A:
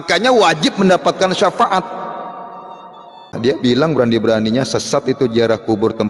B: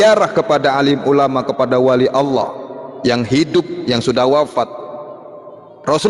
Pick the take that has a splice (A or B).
A